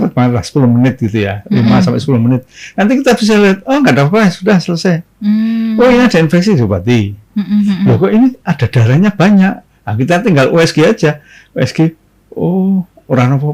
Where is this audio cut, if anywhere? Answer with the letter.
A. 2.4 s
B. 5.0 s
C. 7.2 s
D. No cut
D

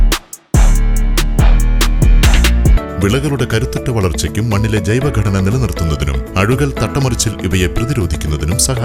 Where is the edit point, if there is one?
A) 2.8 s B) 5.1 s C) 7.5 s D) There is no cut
A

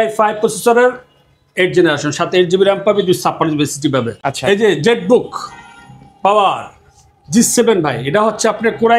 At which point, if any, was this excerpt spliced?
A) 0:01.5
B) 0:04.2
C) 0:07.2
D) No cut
B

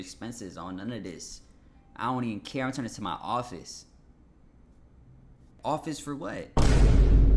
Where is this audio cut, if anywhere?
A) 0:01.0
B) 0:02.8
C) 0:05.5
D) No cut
C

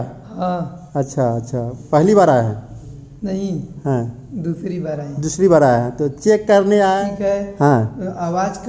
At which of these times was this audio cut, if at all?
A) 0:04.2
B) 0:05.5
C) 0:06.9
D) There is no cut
C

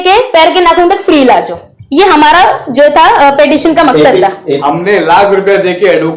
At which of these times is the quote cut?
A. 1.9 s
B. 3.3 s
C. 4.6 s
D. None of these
C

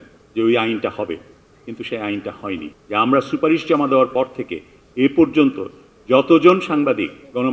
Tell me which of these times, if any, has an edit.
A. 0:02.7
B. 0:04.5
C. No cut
A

